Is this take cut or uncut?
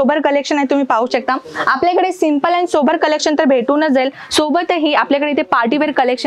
uncut